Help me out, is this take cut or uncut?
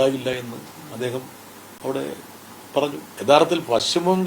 cut